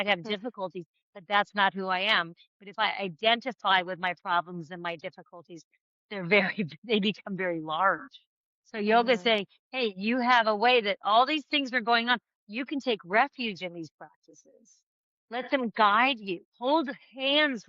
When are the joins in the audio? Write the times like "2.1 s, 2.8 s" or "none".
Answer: 16.5 s

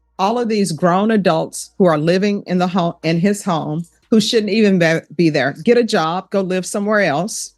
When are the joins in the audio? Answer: none

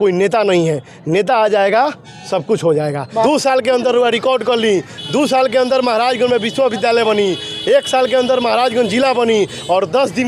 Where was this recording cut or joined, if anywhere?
3.2 s

